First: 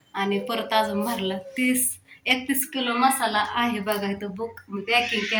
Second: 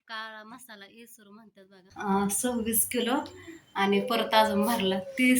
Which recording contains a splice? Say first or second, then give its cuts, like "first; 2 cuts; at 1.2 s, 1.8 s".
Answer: second; 1 cut; at 1.9 s